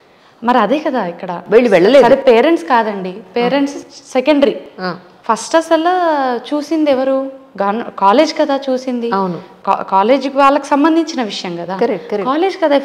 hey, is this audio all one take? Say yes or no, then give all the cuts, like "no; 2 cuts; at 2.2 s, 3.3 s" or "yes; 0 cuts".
yes; 0 cuts